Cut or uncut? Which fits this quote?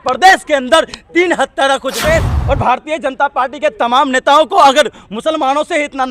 cut